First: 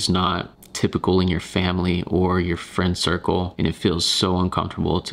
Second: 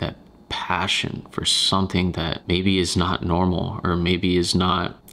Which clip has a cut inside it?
first; 1 cut; at 3.5 s

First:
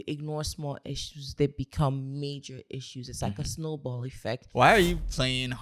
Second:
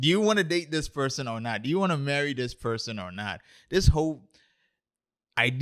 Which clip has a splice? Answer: first; 1 cut; at 4.5 s

